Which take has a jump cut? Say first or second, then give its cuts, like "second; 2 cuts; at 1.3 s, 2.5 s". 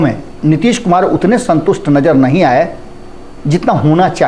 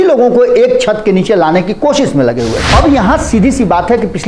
second; 1 cut; at 2.6 s